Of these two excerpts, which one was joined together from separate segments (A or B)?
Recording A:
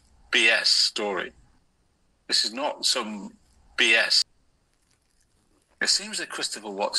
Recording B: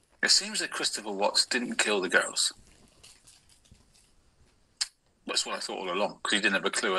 A